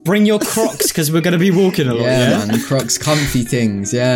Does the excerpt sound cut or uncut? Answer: uncut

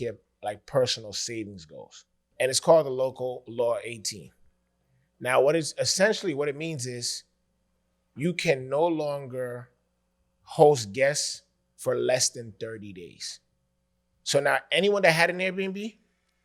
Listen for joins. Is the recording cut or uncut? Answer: cut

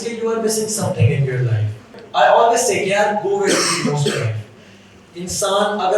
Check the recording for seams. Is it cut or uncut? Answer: cut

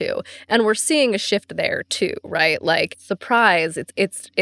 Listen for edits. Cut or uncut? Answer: cut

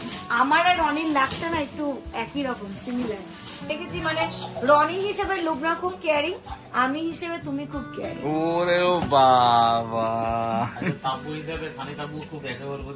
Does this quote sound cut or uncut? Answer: cut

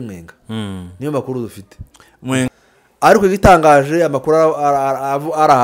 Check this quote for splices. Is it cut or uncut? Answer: cut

